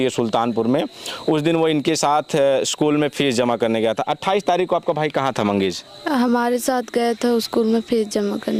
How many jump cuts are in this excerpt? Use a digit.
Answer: 0